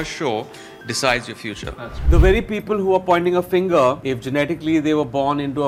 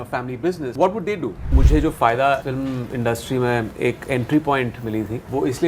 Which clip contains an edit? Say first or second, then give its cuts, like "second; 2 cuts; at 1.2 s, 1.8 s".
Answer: second; 1 cut; at 1.5 s